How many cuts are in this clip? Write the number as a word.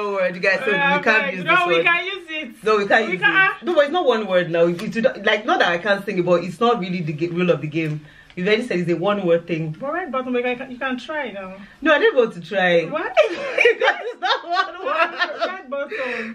zero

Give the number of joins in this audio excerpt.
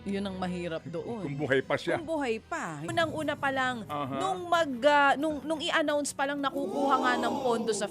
one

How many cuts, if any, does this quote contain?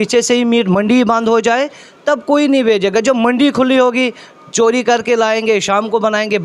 zero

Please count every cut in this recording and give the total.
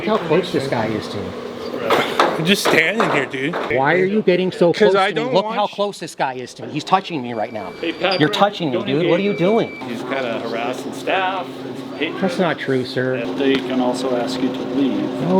three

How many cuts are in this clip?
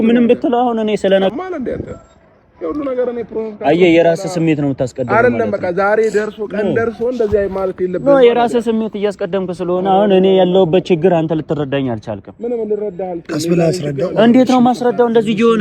one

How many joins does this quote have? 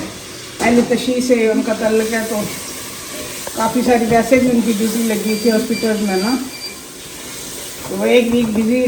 zero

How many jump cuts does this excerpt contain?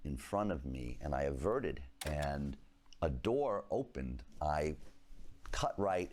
two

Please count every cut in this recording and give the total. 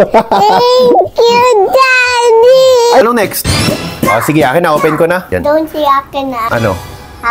one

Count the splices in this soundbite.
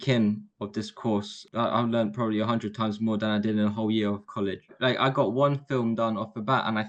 two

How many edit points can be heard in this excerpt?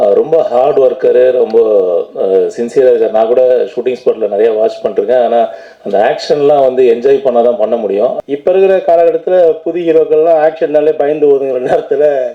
one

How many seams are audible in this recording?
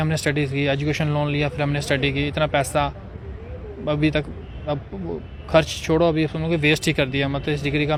zero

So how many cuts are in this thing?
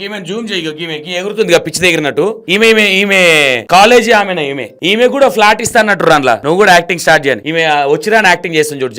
five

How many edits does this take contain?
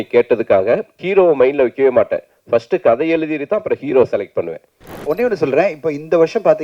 two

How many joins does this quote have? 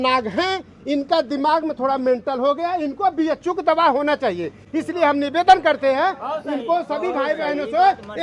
zero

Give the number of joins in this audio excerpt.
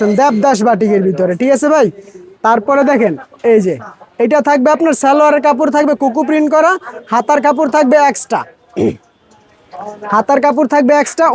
zero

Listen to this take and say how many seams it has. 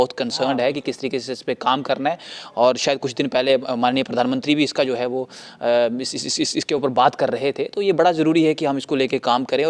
zero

